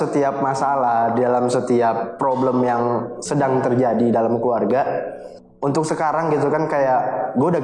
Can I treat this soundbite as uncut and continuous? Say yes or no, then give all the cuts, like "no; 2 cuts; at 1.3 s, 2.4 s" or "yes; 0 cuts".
yes; 0 cuts